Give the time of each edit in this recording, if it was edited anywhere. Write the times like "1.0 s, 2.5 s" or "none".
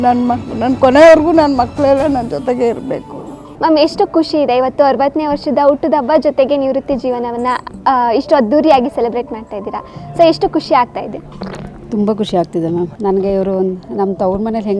3.5 s